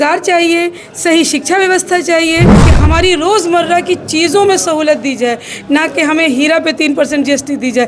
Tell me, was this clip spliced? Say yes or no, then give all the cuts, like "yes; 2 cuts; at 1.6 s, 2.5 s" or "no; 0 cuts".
yes; 1 cut; at 2.6 s